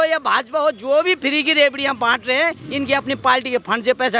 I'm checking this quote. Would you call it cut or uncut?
uncut